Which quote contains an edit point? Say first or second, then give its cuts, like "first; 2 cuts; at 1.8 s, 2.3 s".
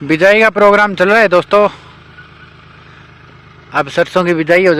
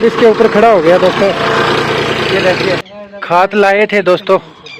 second; 1 cut; at 2.8 s